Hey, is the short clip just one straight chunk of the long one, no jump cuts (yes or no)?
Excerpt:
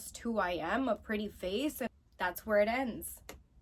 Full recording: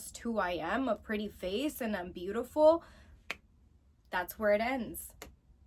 no